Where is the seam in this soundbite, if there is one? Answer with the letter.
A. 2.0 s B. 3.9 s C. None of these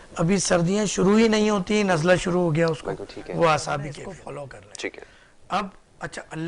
B